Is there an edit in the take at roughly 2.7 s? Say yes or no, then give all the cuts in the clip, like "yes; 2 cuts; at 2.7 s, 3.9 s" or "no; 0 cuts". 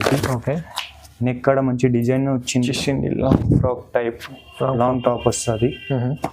yes; 1 cut; at 2.7 s